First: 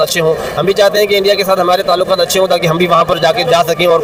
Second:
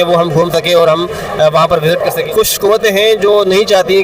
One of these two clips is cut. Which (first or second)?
second